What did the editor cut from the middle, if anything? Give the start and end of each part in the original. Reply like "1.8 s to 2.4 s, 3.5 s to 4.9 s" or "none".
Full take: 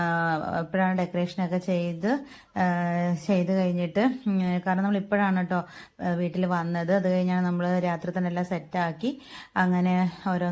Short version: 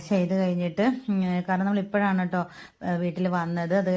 none